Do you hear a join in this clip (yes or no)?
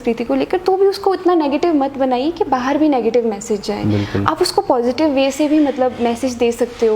no